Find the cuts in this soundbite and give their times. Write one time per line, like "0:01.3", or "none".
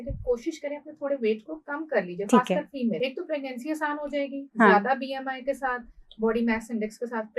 0:03.0